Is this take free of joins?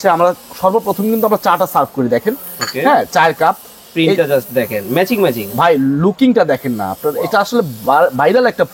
yes; 0 cuts

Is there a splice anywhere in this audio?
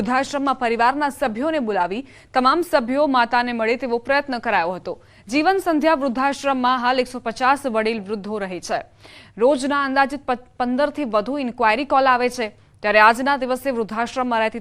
yes; 1 cut; at 7.7 s

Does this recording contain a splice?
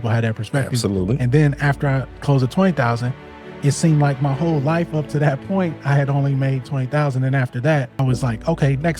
yes; 1 cut; at 7.9 s

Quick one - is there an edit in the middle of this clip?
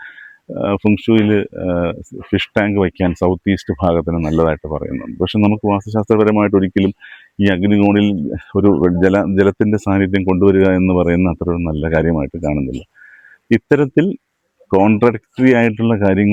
no; 0 cuts

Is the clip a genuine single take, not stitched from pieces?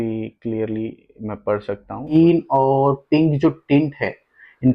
no; 1 cut; at 2.1 s

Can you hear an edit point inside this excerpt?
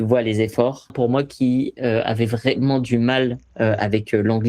yes; 1 cut; at 0.9 s

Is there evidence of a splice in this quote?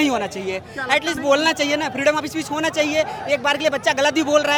no; 0 cuts

